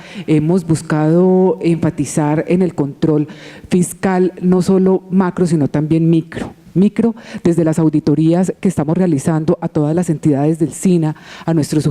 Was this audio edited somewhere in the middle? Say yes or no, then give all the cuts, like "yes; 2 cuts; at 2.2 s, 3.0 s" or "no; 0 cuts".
yes; 1 cut; at 3.9 s